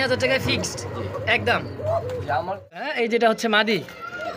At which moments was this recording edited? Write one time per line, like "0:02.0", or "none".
0:02.9